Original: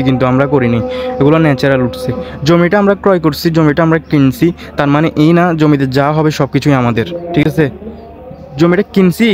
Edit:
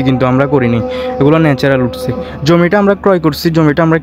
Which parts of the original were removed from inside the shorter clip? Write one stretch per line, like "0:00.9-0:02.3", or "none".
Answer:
none